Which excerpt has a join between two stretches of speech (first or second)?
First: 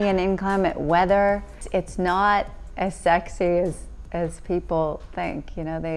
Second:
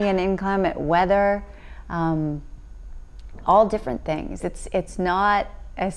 first